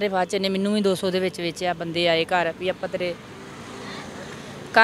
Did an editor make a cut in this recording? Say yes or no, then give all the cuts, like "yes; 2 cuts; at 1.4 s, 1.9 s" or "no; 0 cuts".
no; 0 cuts